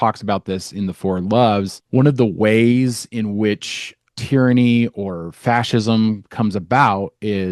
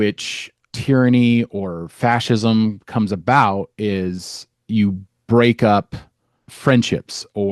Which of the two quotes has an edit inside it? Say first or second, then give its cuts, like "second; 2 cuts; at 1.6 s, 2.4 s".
first; 1 cut; at 1.8 s